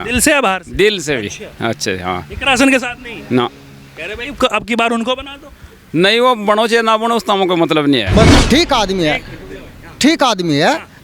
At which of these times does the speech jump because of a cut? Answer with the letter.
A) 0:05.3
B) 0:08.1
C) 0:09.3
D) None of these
B